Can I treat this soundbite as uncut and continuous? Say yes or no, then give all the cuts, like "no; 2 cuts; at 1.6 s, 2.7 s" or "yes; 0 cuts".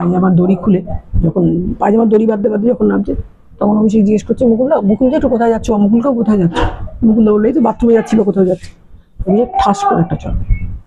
yes; 0 cuts